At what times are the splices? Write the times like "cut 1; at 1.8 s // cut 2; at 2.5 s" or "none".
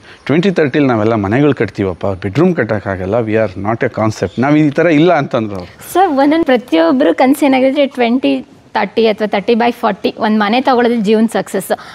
cut 1; at 6.4 s